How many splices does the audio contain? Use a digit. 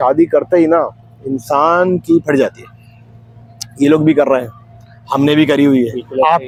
0